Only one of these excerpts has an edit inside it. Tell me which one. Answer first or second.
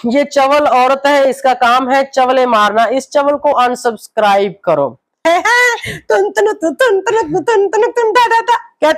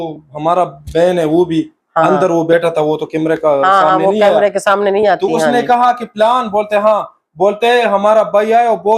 first